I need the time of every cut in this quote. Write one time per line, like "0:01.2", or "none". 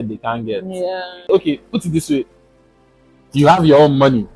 0:01.3